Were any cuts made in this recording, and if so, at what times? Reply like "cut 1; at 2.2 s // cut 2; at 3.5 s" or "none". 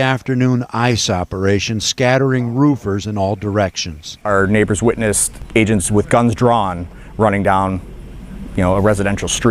none